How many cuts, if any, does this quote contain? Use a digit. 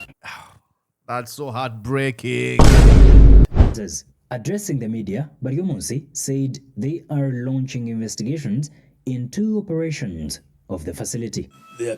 1